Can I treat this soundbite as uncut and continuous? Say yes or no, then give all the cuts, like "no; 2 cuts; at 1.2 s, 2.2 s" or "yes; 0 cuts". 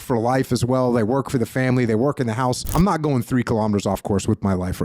no; 1 cut; at 2.7 s